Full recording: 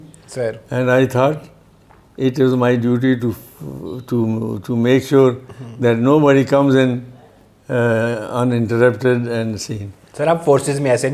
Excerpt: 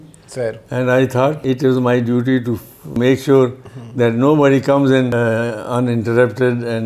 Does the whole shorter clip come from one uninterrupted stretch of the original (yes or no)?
no